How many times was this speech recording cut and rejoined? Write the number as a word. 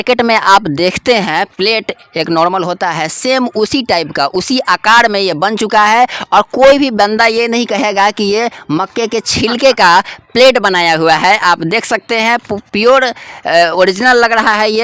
zero